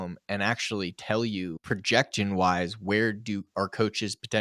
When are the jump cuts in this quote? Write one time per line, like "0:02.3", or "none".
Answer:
0:01.5